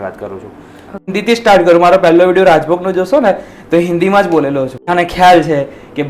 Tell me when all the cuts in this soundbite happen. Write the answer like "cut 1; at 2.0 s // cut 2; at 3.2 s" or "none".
cut 1; at 1.1 s // cut 2; at 4.9 s